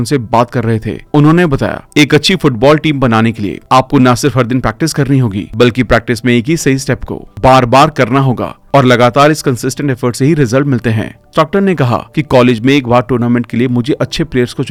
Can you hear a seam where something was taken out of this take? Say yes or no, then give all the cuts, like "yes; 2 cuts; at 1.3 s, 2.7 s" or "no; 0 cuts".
no; 0 cuts